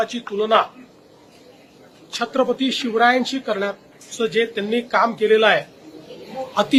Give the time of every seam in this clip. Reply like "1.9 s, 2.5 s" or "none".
none